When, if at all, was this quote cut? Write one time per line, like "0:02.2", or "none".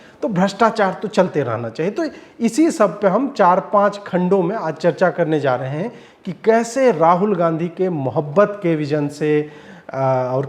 none